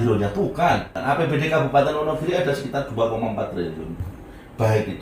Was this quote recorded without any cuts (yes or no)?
no